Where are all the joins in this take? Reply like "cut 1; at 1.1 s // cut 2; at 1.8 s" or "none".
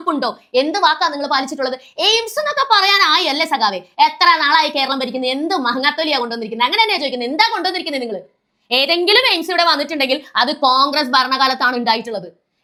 none